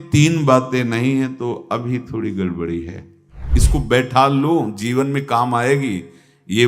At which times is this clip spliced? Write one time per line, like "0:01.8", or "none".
0:03.5